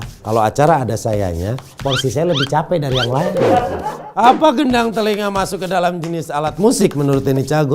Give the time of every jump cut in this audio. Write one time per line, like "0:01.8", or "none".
0:03.7